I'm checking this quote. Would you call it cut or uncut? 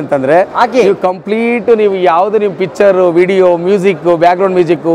uncut